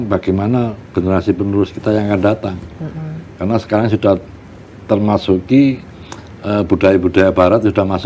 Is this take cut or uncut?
uncut